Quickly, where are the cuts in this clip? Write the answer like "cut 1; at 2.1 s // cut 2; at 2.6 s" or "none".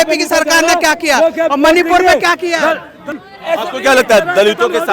cut 1; at 3.0 s